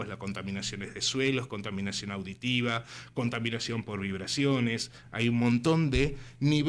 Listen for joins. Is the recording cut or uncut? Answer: uncut